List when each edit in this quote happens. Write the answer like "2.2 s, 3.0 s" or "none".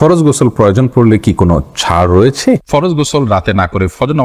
2.6 s